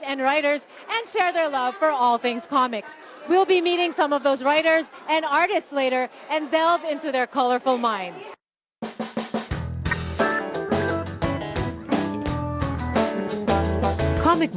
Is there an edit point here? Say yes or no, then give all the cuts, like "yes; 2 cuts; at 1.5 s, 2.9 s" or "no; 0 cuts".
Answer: no; 0 cuts